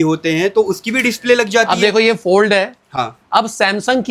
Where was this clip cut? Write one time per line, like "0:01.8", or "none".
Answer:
none